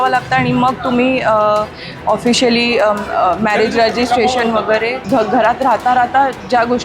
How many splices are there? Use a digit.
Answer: 1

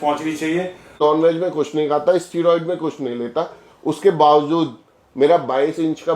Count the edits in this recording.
1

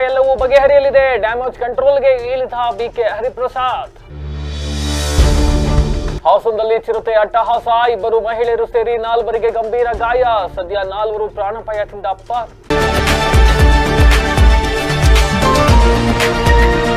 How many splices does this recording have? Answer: 1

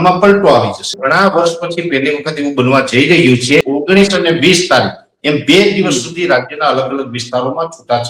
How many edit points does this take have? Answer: 2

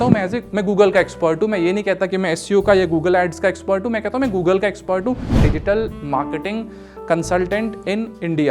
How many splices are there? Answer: 1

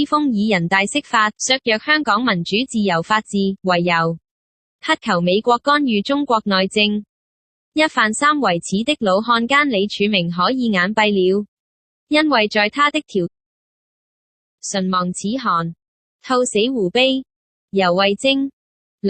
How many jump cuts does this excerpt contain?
0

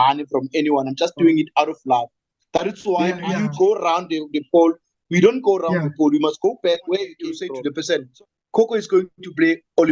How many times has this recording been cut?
2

